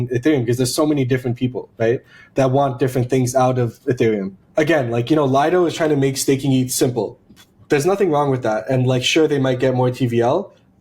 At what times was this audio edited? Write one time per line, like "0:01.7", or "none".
0:04.4